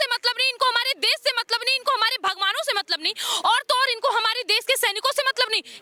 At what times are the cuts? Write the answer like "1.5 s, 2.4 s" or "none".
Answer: none